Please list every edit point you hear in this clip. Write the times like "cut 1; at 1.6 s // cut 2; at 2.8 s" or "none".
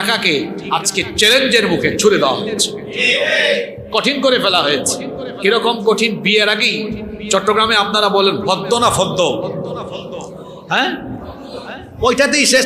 none